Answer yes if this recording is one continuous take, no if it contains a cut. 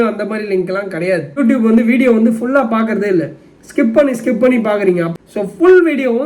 no